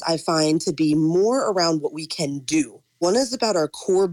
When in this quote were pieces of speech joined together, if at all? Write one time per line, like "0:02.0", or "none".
0:03.0